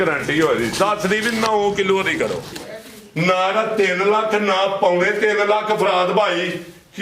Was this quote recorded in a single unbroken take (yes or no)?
no